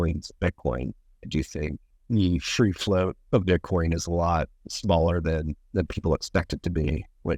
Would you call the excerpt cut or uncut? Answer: cut